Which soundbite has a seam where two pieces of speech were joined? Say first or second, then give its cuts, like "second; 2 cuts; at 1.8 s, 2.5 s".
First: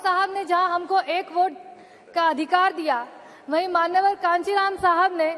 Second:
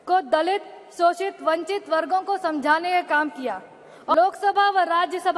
second; 1 cut; at 4.1 s